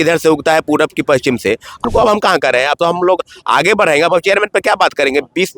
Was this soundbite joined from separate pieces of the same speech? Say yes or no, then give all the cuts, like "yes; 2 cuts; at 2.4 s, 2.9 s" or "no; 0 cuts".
yes; 1 cut; at 1.8 s